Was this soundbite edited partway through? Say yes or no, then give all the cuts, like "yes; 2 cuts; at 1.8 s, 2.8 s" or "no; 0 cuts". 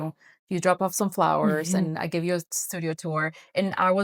no; 0 cuts